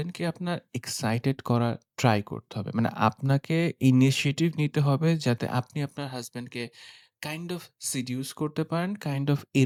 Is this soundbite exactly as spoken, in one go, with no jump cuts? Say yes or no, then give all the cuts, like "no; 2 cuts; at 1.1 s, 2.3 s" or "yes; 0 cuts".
yes; 0 cuts